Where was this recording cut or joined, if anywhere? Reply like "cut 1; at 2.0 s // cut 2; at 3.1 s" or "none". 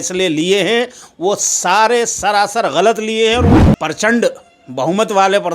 cut 1; at 3.5 s